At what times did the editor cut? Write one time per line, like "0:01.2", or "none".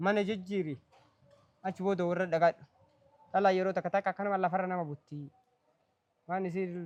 none